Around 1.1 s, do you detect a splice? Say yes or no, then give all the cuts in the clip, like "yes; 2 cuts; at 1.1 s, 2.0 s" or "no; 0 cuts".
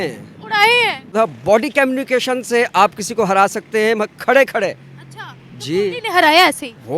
yes; 1 cut; at 1.1 s